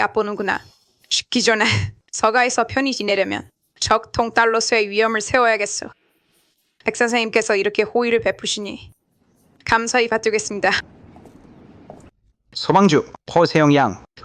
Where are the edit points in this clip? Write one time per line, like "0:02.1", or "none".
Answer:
0:12.1